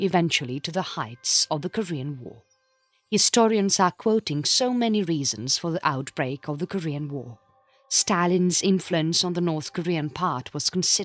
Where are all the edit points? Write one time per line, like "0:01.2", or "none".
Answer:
none